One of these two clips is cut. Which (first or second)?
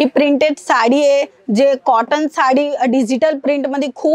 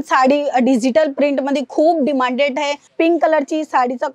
second